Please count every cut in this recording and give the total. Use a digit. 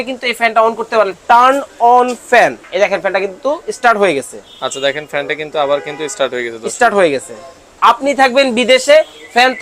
3